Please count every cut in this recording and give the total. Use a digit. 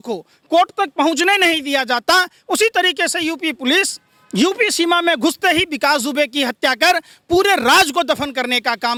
0